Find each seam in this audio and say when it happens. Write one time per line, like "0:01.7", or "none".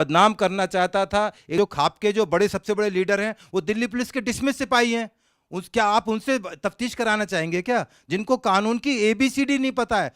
0:01.5